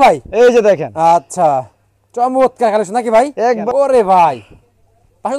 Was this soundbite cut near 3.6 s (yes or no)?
yes